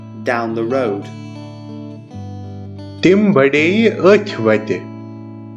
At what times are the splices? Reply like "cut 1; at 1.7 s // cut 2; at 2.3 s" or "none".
cut 1; at 1.0 s // cut 2; at 2.5 s